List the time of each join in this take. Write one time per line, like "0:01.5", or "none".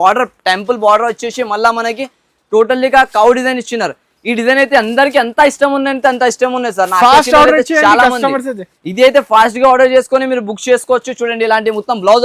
none